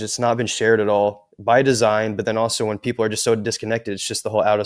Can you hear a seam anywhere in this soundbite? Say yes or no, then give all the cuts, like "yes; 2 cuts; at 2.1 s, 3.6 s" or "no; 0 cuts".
no; 0 cuts